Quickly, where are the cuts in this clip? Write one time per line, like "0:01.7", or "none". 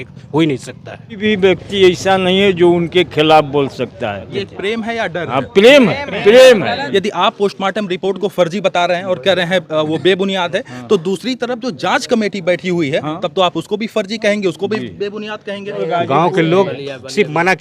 0:01.2
0:04.4
0:06.8
0:15.7